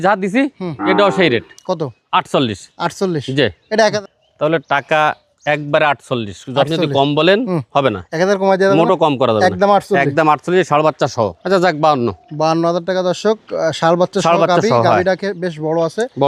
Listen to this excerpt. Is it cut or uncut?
cut